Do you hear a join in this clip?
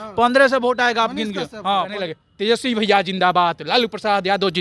yes; 1 cut; at 1.9 s

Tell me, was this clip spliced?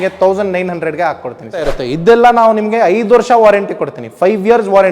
yes; 1 cut; at 1.8 s

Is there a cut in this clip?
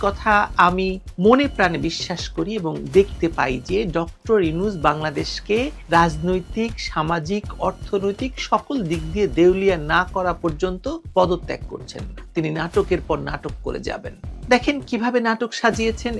no; 0 cuts

